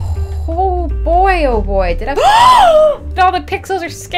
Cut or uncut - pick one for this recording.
cut